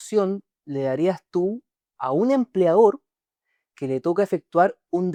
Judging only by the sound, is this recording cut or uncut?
uncut